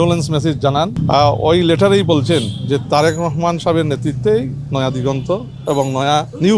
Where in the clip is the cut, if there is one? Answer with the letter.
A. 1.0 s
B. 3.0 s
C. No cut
A